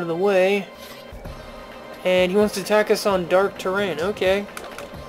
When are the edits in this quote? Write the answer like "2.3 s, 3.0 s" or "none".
1.4 s